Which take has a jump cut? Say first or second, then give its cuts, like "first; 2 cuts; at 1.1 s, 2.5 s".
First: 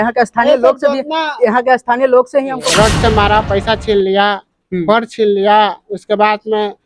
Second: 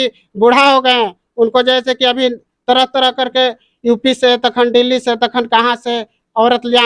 first; 1 cut; at 2.6 s